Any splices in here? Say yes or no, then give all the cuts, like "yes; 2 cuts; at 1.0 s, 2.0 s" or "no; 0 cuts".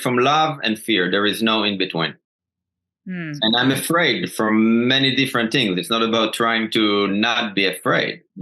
no; 0 cuts